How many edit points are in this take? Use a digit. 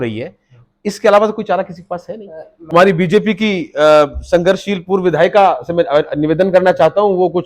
1